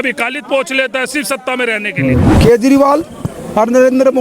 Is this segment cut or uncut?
cut